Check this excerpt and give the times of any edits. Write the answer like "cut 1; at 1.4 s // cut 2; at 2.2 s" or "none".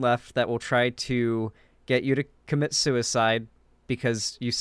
none